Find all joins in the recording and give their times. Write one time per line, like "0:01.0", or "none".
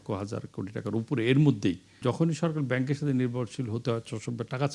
0:02.0